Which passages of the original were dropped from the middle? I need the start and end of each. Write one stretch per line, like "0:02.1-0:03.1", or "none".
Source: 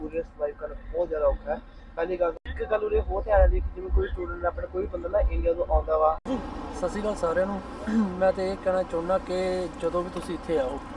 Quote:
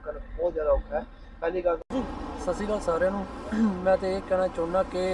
0:02.4-0:06.2

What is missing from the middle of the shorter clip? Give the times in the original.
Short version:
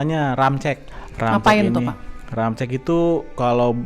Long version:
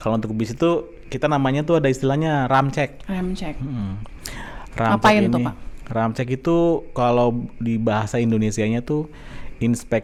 0:03.0-0:04.5

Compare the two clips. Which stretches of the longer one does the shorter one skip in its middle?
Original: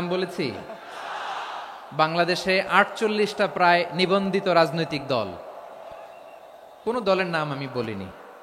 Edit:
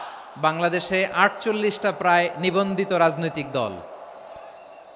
none

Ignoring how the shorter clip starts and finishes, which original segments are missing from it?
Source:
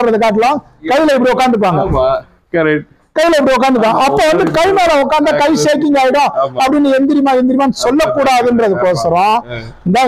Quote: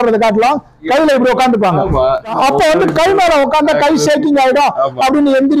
0:02.3-0:03.9

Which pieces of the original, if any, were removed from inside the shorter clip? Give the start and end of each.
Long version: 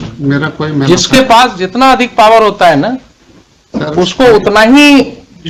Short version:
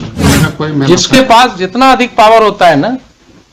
none

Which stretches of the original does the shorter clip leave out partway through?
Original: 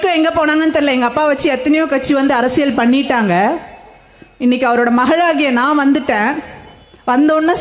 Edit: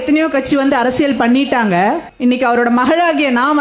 0:03.7-0:04.3

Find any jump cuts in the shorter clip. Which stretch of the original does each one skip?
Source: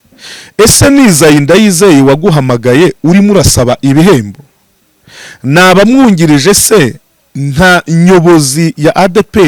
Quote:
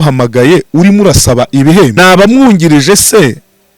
0:04.2-0:05.5

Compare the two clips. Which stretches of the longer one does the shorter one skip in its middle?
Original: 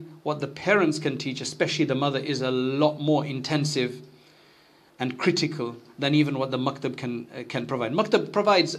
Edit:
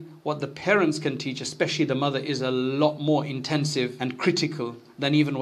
0:03.9-0:04.9

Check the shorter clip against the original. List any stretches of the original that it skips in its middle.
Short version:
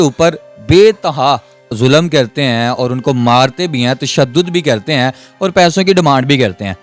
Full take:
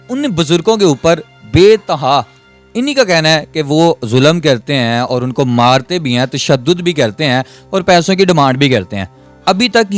0:02.6-0:04.0

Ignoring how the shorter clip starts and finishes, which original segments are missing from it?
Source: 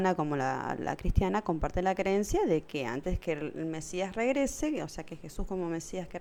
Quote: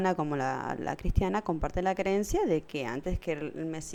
none

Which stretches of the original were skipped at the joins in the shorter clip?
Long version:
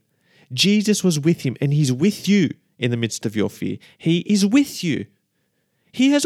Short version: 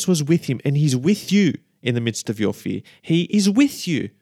none

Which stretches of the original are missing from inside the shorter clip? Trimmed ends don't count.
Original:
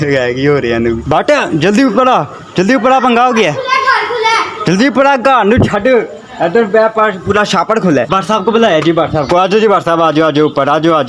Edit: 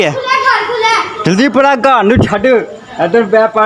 none

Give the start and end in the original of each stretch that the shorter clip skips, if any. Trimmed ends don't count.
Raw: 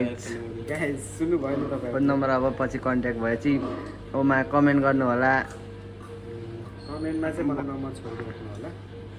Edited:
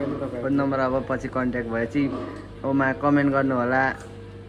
none

